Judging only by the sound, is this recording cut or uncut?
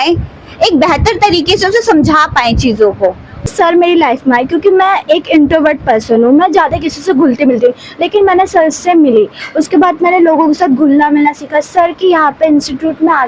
cut